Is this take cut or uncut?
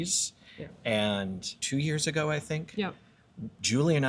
cut